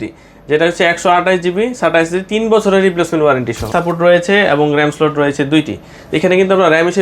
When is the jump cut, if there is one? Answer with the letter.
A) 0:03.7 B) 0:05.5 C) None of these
A